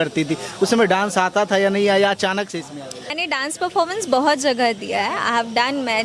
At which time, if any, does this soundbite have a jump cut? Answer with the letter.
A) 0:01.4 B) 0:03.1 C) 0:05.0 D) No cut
B